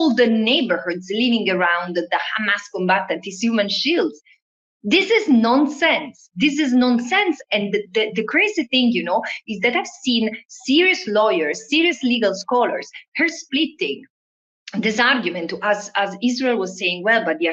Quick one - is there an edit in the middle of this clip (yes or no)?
no